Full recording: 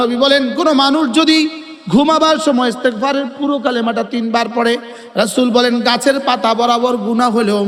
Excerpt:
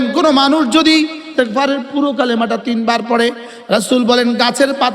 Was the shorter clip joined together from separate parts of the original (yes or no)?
yes